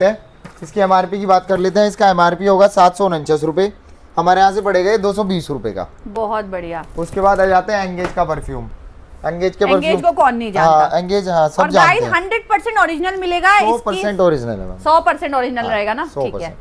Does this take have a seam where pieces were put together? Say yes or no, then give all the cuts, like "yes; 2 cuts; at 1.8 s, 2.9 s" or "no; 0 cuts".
no; 0 cuts